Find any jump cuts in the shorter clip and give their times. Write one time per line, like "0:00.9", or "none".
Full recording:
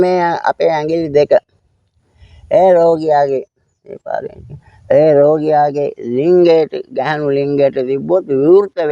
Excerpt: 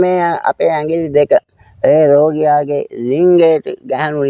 0:01.6